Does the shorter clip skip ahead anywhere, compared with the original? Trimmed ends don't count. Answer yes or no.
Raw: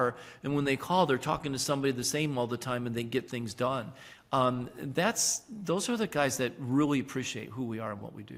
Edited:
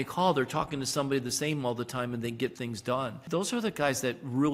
yes